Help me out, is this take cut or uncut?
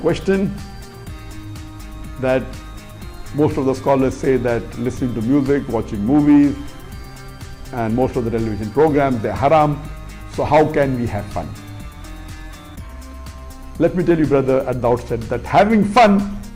uncut